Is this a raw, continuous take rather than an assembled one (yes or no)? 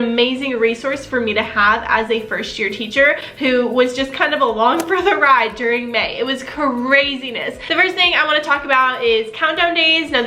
yes